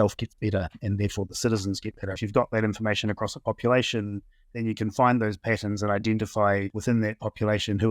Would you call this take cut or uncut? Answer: cut